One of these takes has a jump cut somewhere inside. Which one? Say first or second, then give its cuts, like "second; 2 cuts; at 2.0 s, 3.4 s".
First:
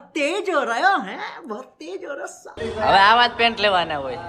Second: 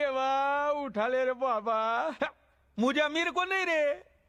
first; 1 cut; at 2.5 s